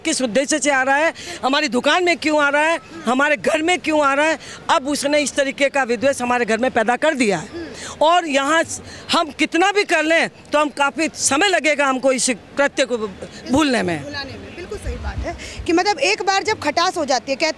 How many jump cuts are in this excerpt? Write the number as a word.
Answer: zero